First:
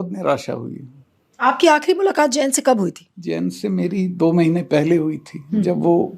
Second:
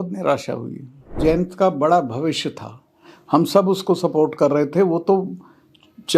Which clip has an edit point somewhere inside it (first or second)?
second